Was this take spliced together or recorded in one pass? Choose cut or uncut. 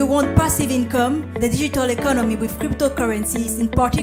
uncut